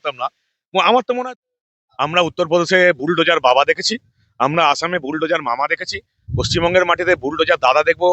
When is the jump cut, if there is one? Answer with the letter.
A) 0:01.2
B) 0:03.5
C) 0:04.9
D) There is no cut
A